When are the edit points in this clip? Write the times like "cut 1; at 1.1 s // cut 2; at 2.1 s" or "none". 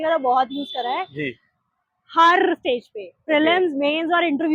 none